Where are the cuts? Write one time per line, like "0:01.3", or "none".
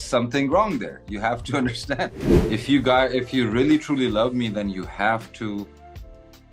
0:02.3